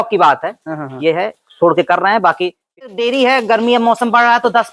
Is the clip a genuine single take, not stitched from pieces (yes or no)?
no